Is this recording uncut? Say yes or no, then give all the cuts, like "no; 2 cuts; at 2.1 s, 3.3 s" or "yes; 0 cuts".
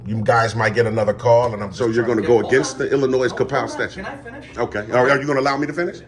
no; 1 cut; at 1.7 s